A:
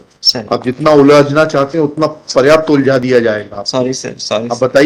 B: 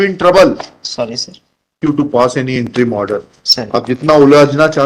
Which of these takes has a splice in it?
B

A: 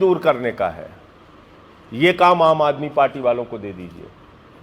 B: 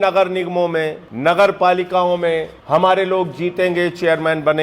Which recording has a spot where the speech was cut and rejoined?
B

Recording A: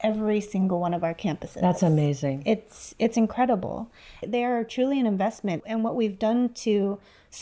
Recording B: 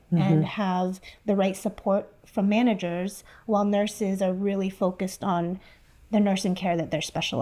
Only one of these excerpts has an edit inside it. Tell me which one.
A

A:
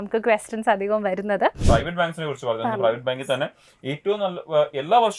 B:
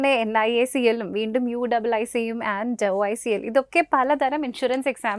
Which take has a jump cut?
A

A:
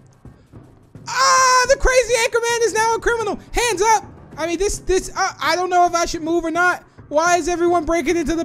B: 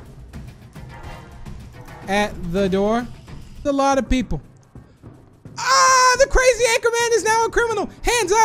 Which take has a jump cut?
B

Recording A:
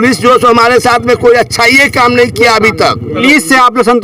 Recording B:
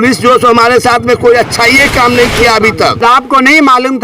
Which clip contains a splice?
B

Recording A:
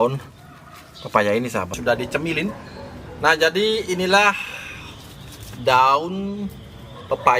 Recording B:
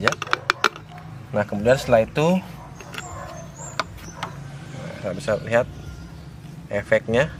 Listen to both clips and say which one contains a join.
A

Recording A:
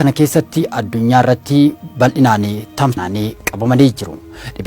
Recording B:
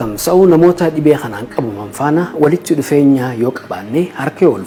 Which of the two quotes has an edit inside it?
A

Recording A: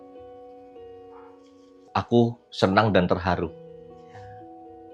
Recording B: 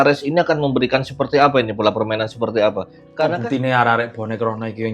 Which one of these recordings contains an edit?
B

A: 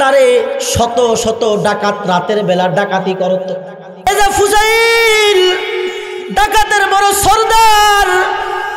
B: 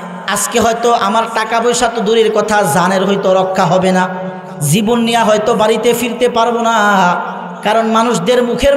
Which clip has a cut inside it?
A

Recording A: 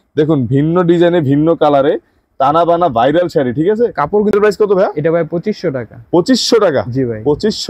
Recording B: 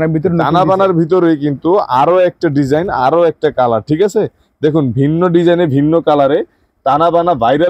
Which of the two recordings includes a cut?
A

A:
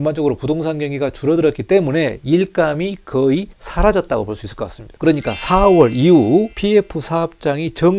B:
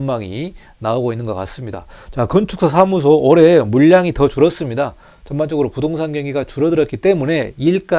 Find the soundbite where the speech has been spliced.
A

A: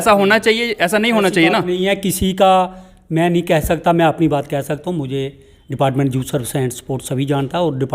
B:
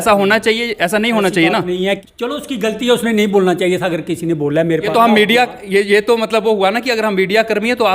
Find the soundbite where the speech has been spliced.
B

